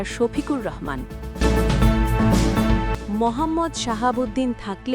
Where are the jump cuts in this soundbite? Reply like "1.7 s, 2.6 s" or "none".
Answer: 1.2 s